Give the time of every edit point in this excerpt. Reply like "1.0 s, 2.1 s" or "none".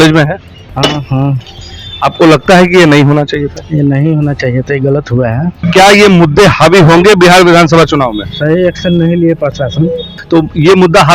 5.6 s, 10.1 s